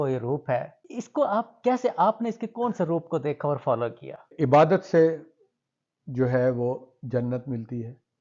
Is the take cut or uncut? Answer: uncut